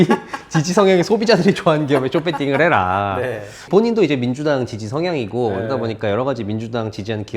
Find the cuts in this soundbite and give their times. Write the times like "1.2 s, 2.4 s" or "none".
3.6 s